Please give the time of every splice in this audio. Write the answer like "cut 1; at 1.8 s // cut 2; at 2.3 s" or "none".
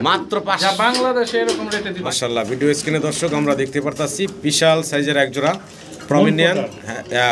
cut 1; at 2.0 s